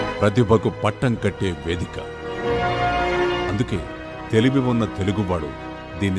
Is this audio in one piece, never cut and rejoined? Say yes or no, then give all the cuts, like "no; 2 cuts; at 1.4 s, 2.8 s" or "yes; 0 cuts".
yes; 0 cuts